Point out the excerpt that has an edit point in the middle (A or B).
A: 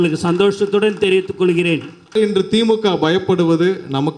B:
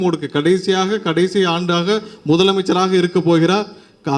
A